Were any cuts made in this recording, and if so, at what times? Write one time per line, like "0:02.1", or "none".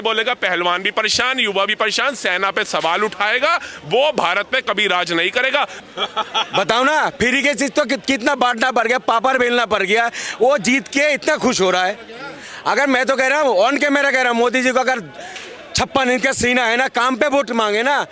0:05.8